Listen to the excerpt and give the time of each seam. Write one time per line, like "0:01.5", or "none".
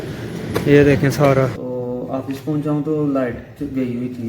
0:01.6